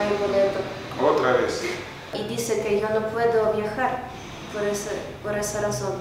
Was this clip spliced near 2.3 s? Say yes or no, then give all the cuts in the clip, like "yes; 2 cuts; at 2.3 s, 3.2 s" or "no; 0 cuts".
yes; 1 cut; at 2.3 s